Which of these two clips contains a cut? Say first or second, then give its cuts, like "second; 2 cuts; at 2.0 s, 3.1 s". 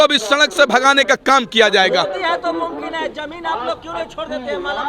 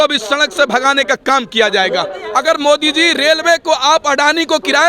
second; 1 cut; at 2.2 s